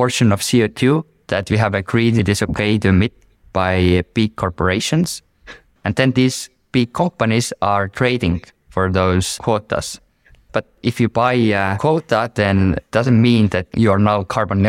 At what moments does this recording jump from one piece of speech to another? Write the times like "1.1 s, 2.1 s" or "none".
2.2 s, 5.6 s, 11.8 s